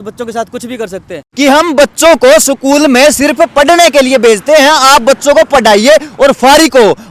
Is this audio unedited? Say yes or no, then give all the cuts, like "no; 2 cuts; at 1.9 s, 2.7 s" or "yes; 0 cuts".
no; 1 cut; at 1.2 s